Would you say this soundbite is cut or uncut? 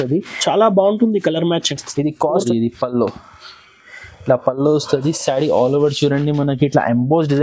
cut